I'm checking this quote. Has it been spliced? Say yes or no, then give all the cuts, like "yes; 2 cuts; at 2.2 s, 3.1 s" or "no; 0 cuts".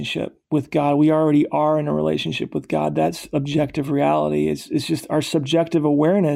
no; 0 cuts